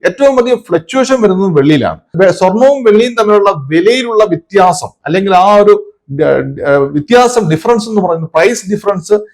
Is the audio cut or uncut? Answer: cut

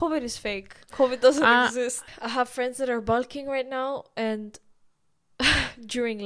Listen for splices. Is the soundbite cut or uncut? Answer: cut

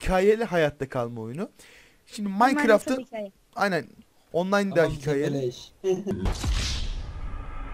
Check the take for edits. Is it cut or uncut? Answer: cut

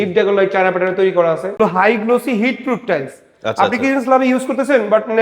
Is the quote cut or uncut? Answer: cut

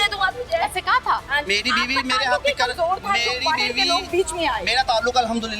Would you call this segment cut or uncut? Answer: cut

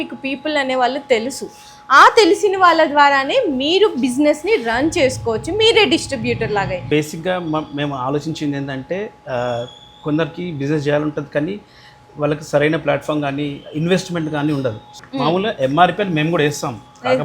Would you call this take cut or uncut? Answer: cut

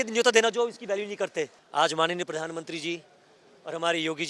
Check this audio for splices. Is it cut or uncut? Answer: cut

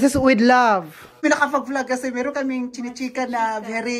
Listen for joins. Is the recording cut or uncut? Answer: cut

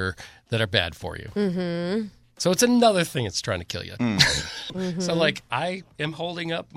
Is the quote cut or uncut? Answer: cut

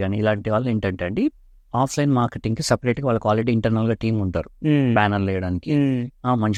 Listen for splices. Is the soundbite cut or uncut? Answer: uncut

